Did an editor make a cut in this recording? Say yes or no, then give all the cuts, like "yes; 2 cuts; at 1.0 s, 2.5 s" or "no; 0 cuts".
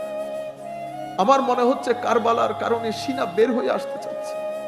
yes; 1 cut; at 1.0 s